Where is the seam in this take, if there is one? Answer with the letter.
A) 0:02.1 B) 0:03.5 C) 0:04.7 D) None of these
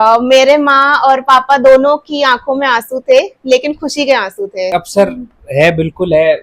C